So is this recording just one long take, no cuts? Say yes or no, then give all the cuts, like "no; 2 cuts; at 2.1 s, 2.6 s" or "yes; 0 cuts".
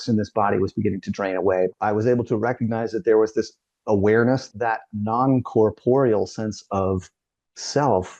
no; 2 cuts; at 1.7 s, 4.5 s